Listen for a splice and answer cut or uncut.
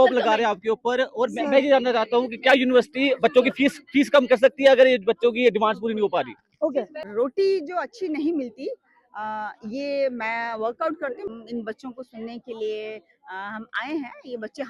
cut